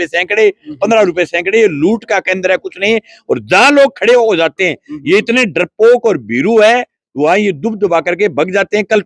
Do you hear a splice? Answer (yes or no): no